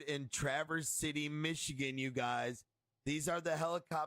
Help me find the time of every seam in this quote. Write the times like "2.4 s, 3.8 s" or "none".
0.9 s

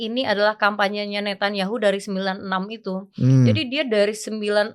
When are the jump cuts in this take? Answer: none

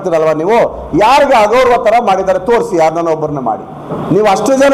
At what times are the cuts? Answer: none

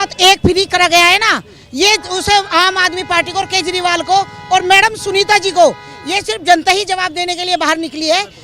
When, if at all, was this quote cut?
none

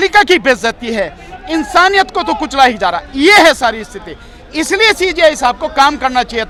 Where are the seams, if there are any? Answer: none

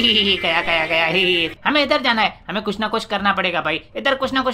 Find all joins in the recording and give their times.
1.6 s

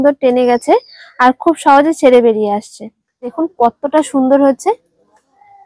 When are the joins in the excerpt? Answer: 3.3 s

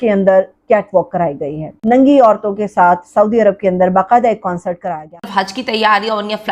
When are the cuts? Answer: 1.7 s, 4.8 s

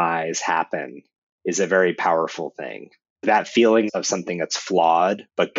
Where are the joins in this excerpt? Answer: 3.2 s, 3.9 s

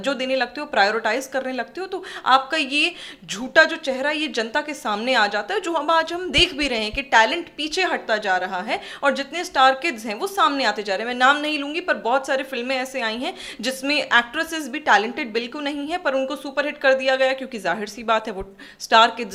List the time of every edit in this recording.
none

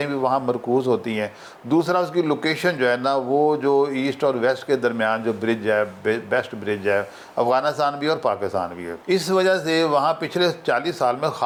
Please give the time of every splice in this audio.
none

